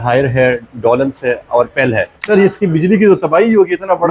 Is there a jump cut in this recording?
yes; 1 cut; at 2.2 s

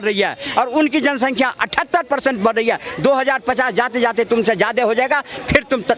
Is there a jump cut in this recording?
no; 0 cuts

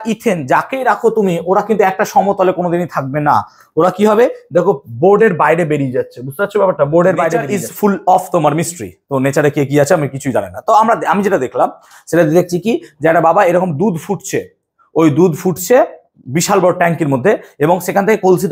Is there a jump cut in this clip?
yes; 1 cut; at 7.6 s

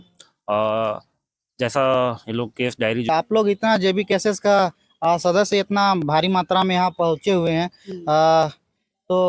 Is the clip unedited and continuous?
no; 1 cut; at 3.1 s

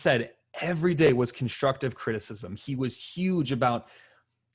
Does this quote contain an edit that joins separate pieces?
no; 0 cuts

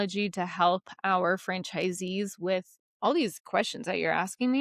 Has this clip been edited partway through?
no; 0 cuts

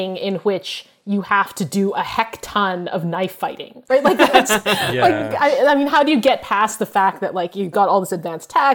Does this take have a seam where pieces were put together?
no; 0 cuts

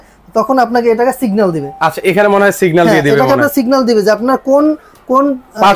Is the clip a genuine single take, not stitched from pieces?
yes; 0 cuts

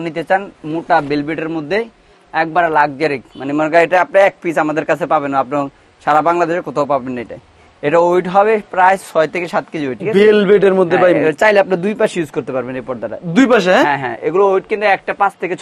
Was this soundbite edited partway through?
yes; 1 cut; at 10.0 s

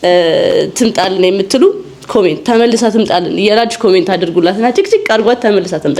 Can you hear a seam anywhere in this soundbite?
no; 0 cuts

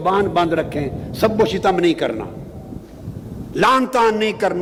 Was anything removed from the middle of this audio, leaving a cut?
no; 0 cuts

